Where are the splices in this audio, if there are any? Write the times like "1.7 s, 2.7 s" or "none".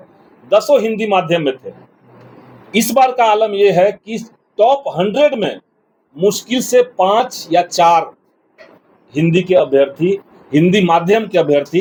none